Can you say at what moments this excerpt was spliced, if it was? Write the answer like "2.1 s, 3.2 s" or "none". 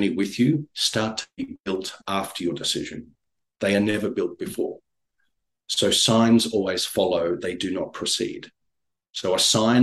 none